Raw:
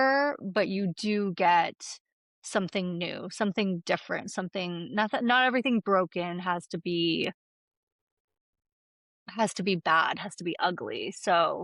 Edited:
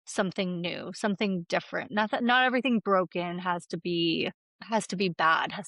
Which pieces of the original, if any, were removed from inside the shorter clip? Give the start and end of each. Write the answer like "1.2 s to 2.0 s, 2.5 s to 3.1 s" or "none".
4.2 s to 4.9 s, 7.5 s to 9.2 s